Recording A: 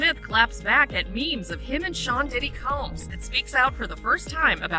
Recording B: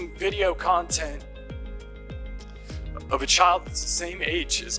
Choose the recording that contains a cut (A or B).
B